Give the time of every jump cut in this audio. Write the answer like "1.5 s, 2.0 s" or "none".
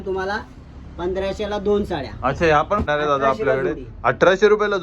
2.8 s